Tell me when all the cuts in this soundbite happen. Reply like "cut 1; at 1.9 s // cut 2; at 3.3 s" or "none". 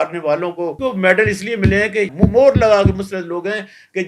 cut 1; at 0.8 s // cut 2; at 2.1 s